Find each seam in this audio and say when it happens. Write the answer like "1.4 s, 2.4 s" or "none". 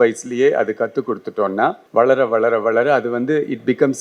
1.8 s